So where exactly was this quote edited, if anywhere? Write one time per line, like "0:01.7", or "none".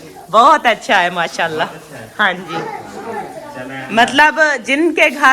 none